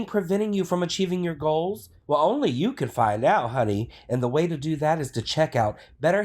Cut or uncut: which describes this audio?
cut